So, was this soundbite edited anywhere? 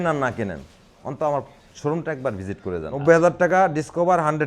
yes; 1 cut; at 3.0 s

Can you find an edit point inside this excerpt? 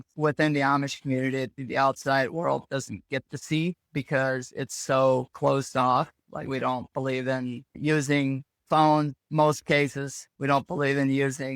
no; 0 cuts

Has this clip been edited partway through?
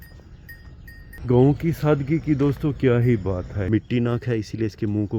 yes; 2 cuts; at 1.1 s, 3.6 s

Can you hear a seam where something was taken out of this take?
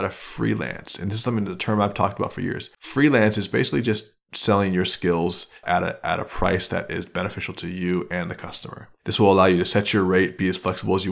yes; 2 cuts; at 5.6 s, 8.9 s

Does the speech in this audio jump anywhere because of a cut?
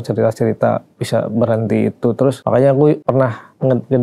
yes; 2 cuts; at 2.4 s, 3.0 s

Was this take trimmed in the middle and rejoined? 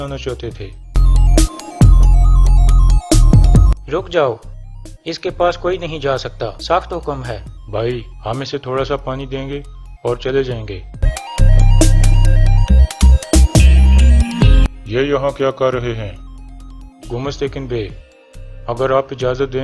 yes; 1 cut; at 2.7 s

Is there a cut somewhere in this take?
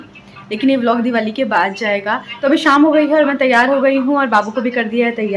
yes; 1 cut; at 2.4 s

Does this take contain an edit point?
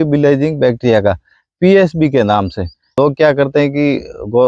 yes; 1 cut; at 3.0 s

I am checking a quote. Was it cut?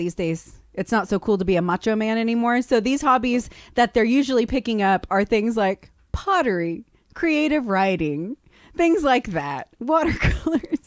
no; 0 cuts

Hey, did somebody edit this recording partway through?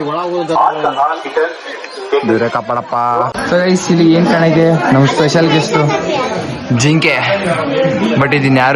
yes; 1 cut; at 3.4 s

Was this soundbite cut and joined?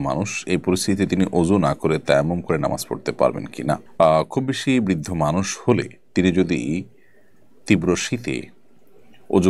no; 0 cuts

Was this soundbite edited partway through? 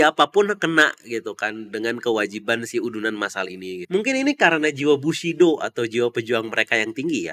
yes; 1 cut; at 3.8 s

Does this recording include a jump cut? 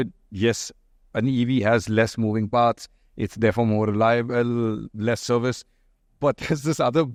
no; 0 cuts

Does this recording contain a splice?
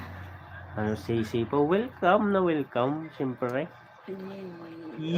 no; 0 cuts

